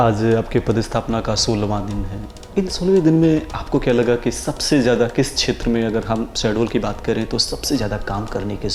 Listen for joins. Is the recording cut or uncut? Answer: uncut